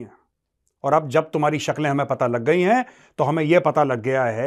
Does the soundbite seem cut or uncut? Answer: uncut